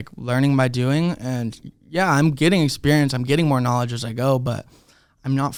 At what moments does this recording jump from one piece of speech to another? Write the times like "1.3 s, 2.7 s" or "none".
none